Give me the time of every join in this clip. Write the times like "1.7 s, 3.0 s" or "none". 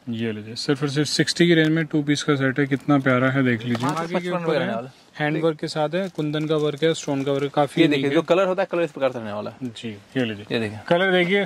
4.0 s